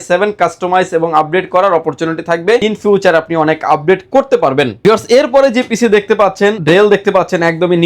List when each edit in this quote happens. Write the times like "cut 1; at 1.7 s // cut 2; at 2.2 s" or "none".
none